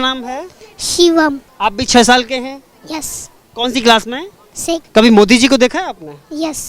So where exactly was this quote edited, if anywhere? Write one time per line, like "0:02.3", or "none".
0:01.5
0:04.8